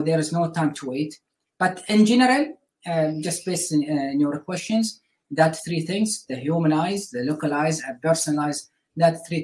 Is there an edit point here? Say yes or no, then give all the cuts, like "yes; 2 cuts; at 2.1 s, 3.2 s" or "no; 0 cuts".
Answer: no; 0 cuts